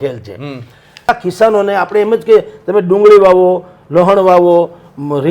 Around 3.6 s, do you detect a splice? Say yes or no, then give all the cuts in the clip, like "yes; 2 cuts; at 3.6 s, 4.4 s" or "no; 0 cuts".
no; 1 cut; at 1.1 s